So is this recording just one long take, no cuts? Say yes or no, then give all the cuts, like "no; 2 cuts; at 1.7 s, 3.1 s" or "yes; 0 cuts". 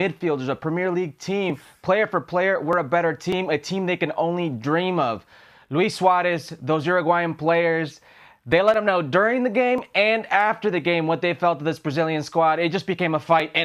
yes; 0 cuts